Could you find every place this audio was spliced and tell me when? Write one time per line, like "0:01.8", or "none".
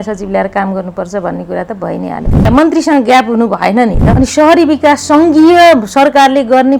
0:02.5
0:04.0